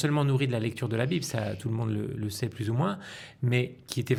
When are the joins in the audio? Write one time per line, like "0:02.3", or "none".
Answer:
none